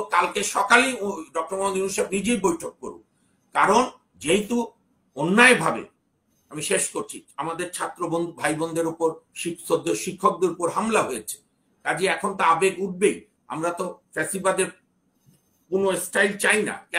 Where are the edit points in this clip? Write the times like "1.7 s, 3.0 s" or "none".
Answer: none